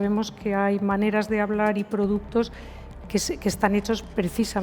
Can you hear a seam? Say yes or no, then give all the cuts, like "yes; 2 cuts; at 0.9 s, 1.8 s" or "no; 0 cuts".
no; 0 cuts